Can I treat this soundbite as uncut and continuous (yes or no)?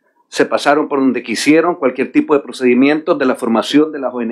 yes